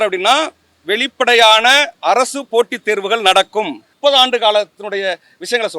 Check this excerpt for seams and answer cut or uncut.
cut